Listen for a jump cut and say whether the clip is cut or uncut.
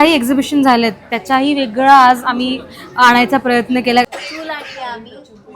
cut